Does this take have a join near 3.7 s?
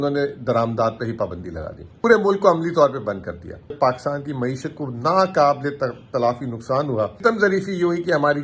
yes; 3 cuts; at 2.0 s, 3.7 s, 7.2 s

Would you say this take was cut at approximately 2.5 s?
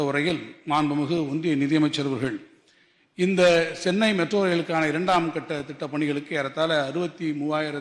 no; 0 cuts

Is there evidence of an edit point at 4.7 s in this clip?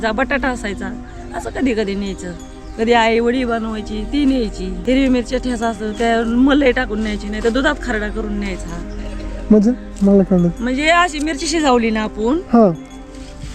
yes; 1 cut; at 4.7 s

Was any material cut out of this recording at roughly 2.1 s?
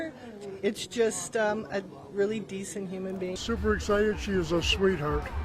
no; 1 cut; at 3.4 s

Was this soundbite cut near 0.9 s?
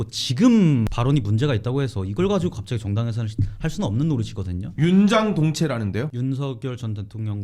yes; 2 cuts; at 0.9 s, 6.1 s

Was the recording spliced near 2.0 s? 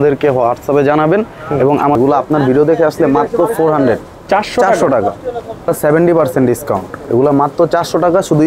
yes; 2 cuts; at 2.0 s, 5.7 s

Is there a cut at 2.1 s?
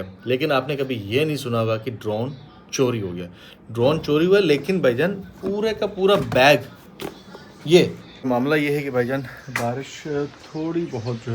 no; 1 cut; at 8.3 s

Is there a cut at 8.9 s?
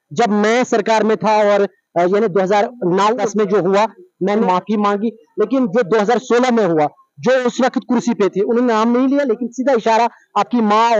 no; 2 cuts; at 3.2 s, 4.4 s

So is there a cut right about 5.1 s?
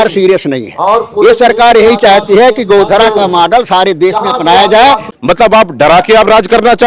yes; 1 cut; at 5.1 s

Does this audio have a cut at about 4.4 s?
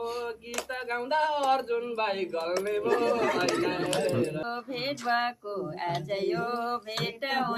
yes; 1 cut; at 4.4 s

